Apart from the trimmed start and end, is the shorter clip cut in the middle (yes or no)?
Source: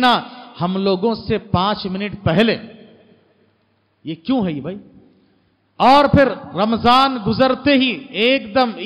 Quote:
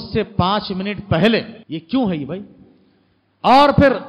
yes